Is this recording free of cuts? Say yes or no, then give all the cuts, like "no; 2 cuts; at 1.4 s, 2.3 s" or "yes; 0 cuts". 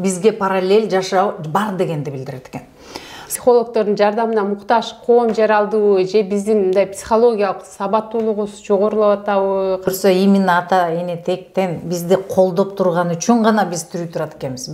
no; 2 cuts; at 3.2 s, 9.9 s